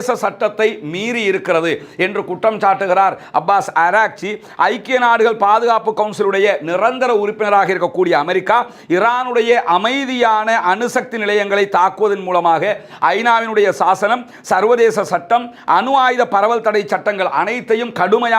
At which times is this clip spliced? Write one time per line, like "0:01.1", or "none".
none